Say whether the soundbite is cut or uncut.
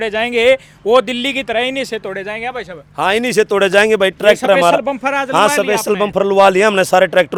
uncut